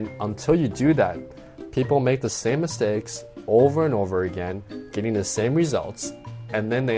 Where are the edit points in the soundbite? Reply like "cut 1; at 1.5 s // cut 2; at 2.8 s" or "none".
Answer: none